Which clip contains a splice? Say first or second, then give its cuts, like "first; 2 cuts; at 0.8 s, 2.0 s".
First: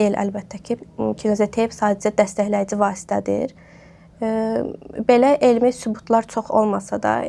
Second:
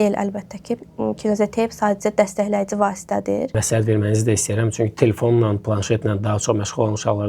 second; 1 cut; at 3.6 s